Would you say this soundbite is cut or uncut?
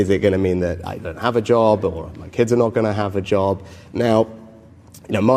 uncut